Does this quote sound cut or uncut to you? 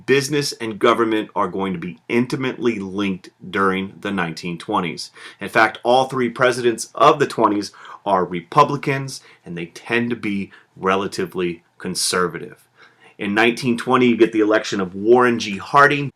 uncut